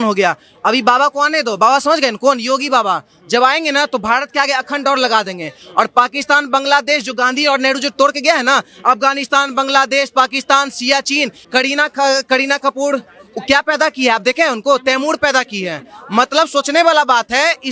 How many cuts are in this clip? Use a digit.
1